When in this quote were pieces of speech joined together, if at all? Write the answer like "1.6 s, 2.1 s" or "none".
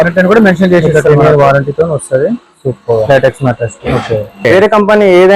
4.5 s